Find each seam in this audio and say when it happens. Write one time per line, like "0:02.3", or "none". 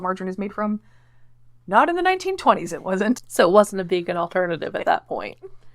0:03.3